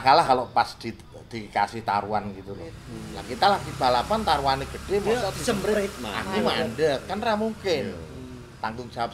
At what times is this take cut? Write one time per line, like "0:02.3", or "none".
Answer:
0:02.3